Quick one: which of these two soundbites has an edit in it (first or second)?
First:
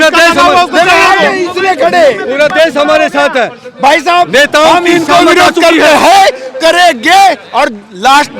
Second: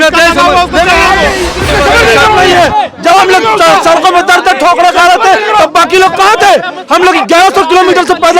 second